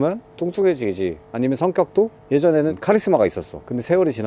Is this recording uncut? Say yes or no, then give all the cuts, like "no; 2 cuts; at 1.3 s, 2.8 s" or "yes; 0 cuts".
no; 1 cut; at 2.7 s